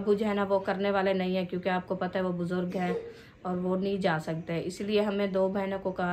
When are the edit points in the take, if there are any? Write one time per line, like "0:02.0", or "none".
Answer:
none